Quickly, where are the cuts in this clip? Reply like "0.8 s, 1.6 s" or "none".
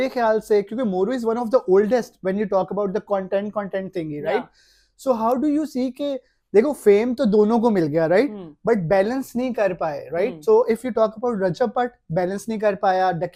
none